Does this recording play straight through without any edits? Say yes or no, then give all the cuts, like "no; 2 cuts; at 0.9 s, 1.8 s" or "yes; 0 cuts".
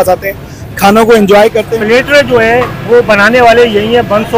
no; 1 cut; at 1.7 s